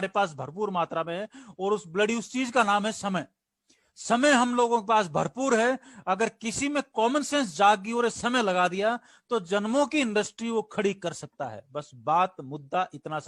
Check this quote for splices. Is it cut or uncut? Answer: uncut